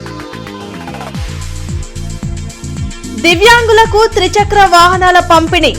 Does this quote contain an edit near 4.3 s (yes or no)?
no